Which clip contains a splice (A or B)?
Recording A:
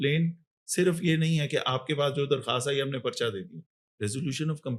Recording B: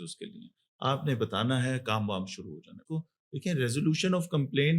B